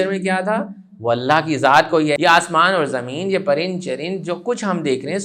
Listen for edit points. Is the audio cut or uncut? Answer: cut